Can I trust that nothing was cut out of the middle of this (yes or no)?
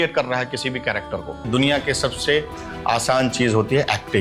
no